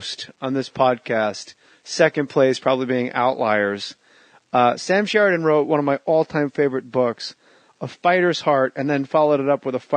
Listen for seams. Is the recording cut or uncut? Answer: cut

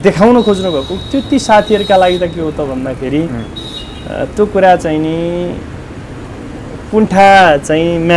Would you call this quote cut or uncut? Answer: uncut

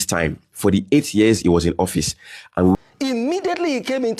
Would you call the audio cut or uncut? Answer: cut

